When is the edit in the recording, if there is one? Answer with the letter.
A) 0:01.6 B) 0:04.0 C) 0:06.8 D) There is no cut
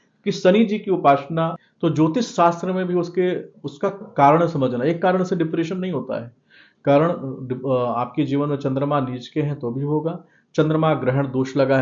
A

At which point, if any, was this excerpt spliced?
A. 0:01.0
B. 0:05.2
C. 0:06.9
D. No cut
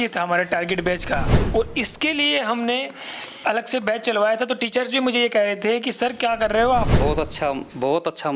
C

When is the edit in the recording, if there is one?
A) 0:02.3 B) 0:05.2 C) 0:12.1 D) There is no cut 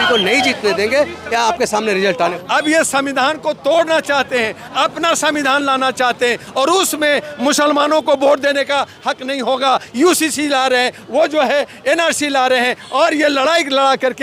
A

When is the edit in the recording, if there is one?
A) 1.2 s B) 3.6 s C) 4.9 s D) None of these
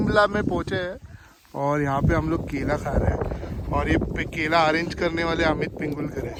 D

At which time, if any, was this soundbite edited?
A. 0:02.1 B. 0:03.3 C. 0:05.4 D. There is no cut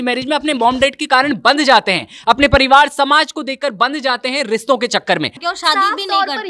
C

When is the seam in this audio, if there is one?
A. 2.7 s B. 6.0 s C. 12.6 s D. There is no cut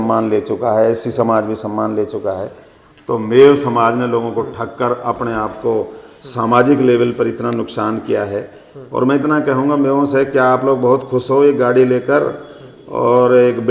D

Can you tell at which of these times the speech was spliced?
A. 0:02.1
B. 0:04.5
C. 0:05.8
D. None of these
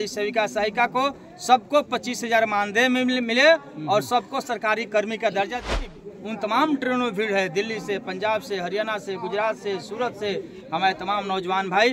C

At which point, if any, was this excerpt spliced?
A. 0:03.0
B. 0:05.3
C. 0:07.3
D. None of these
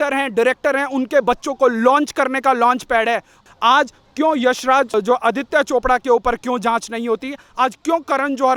D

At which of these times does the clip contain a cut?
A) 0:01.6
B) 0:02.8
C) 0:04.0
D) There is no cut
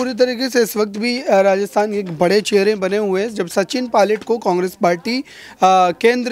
D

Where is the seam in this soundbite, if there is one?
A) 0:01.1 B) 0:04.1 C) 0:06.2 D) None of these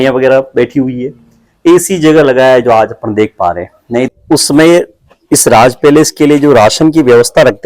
B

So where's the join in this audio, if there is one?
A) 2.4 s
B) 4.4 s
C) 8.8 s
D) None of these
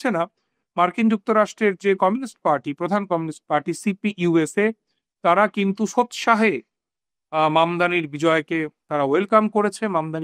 D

